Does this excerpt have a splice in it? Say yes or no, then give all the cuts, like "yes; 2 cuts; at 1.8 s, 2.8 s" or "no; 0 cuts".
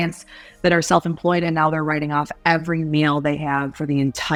no; 0 cuts